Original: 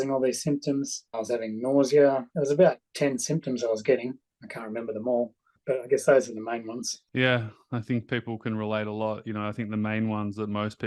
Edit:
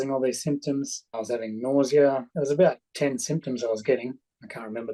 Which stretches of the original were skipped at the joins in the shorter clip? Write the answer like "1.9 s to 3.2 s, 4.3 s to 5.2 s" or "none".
none